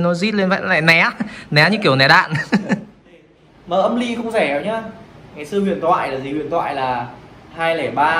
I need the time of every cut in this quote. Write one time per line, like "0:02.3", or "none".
0:03.4

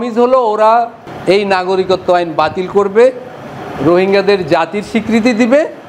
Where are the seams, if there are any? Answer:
none

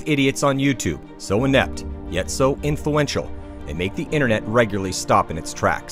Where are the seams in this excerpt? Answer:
none

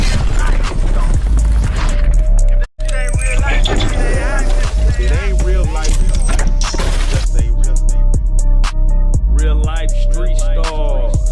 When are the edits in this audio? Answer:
none

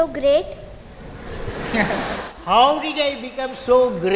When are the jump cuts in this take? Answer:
none

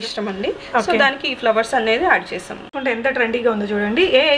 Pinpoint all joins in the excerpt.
0:02.7

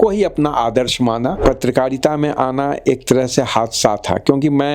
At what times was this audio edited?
0:01.4

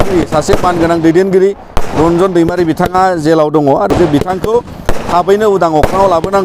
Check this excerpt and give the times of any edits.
0:03.9

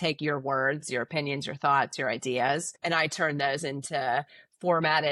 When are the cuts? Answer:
0:02.7

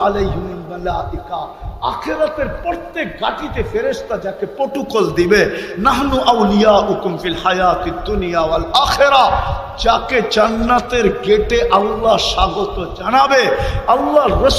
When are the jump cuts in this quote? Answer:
none

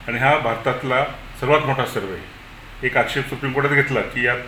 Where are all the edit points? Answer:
none

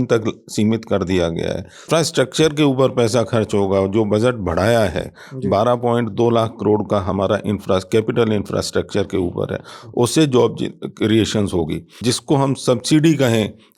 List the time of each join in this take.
0:01.9
0:11.9

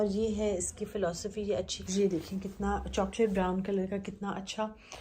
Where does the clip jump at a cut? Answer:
0:01.8

